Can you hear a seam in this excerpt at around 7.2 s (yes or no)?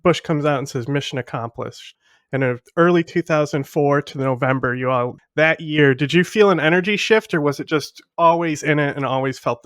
no